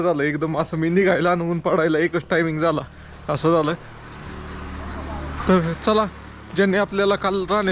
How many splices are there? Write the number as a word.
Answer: zero